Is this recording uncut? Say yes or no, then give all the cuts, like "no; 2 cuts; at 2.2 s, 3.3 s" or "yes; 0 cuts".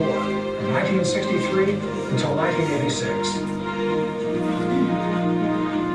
no; 1 cut; at 4.3 s